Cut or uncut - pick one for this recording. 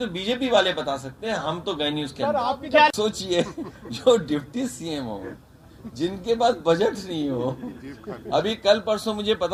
uncut